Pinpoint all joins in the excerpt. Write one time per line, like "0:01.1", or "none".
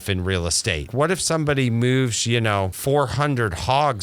0:00.9
0:02.8

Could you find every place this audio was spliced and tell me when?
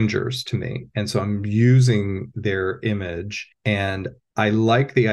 0:03.4
0:04.2

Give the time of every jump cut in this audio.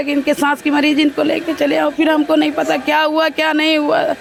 none

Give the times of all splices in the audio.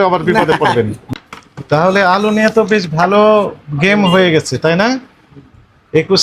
0:01.1

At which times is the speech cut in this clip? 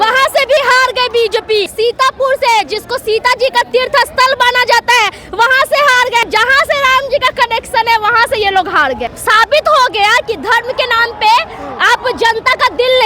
0:01.7
0:06.2
0:09.1

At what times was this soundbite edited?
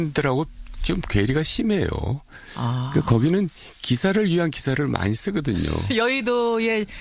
0:03.6

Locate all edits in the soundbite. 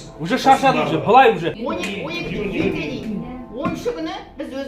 0:01.6

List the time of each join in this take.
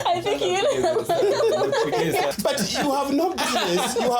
0:02.3

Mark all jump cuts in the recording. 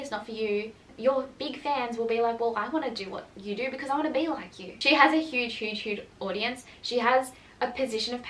0:00.9
0:04.7

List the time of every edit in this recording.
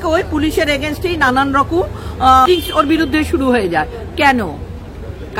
0:02.5

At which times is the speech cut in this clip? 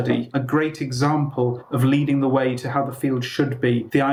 none

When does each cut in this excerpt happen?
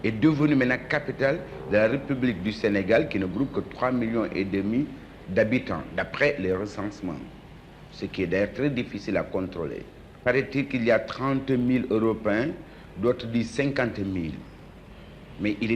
0:09.7

